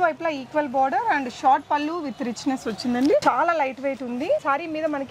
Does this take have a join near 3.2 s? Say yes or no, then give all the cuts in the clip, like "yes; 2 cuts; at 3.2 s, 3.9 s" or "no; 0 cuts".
yes; 1 cut; at 3.2 s